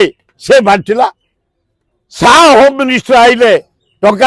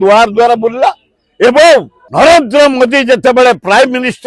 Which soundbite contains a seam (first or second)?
second